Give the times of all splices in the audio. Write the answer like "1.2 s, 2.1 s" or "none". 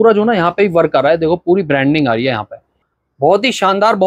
2.9 s